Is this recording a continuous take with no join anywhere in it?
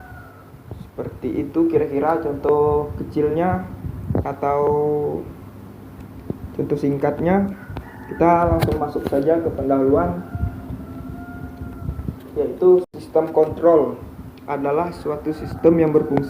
no; 1 cut; at 13.0 s

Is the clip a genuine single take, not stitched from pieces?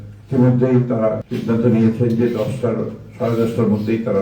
no; 1 cut; at 1.3 s

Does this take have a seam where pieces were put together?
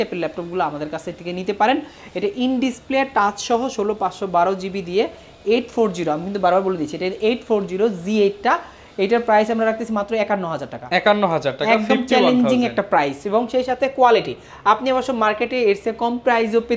no; 0 cuts

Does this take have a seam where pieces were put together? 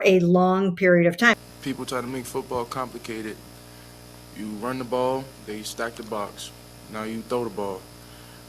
yes; 1 cut; at 1.4 s

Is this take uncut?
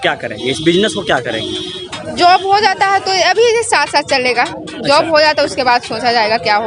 yes; 0 cuts

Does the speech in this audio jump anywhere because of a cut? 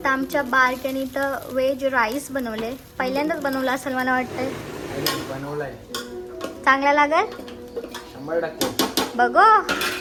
no; 0 cuts

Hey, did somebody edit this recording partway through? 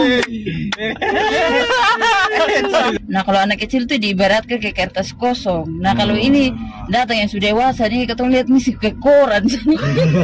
yes; 1 cut; at 2.9 s

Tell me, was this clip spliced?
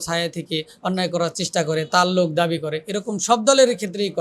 no; 0 cuts

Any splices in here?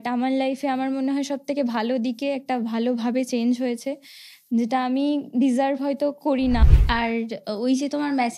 yes; 1 cut; at 6.6 s

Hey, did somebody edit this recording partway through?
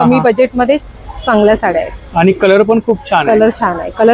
no; 0 cuts

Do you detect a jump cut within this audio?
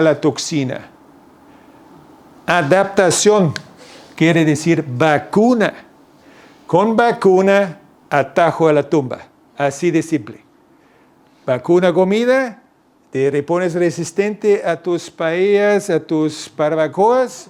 no; 0 cuts

